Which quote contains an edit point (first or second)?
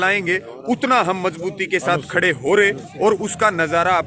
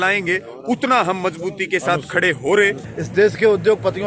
second